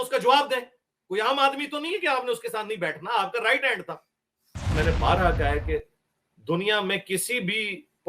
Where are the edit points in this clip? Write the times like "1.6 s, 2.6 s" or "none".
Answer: 4.7 s